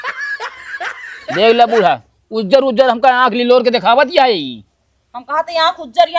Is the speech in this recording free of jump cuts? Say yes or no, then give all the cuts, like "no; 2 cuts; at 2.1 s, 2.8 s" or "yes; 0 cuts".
no; 1 cut; at 1.3 s